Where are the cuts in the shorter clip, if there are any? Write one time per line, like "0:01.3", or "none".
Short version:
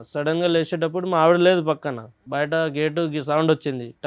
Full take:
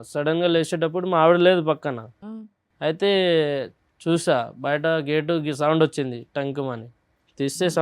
0:02.2